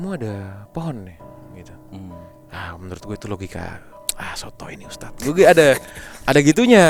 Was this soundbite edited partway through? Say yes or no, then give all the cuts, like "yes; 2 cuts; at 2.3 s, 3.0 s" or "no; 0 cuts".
no; 0 cuts